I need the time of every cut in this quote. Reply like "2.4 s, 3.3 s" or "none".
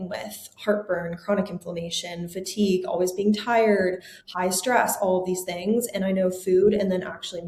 none